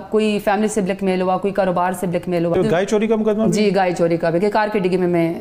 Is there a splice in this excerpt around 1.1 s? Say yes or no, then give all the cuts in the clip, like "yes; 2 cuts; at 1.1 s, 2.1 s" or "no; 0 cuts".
no; 1 cut; at 2.5 s